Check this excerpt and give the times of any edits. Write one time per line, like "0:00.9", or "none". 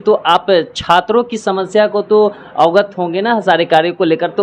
none